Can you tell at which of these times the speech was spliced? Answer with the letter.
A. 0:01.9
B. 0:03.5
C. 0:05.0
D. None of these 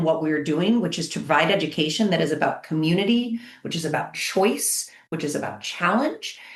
D